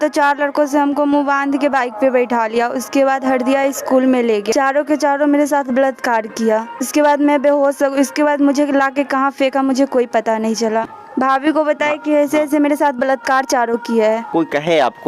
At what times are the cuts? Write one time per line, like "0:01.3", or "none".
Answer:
0:04.5
0:06.8
0:10.9
0:14.3